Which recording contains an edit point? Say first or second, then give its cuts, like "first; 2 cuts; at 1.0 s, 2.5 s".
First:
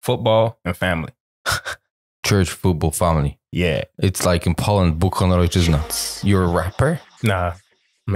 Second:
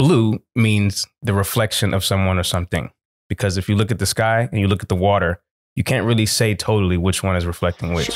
first; 2 cuts; at 5.9 s, 7.1 s